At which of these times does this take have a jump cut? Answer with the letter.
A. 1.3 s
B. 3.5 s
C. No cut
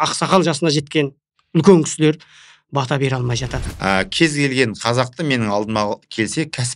B